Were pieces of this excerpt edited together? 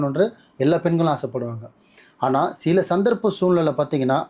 no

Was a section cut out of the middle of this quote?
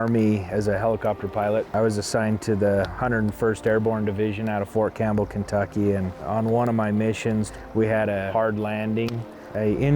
yes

